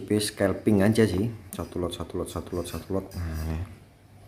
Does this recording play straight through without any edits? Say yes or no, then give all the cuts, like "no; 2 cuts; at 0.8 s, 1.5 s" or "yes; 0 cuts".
yes; 0 cuts